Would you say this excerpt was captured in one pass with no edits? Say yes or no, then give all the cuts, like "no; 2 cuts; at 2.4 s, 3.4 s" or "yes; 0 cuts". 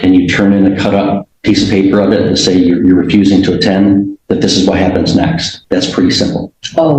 no; 2 cuts; at 1.3 s, 5.5 s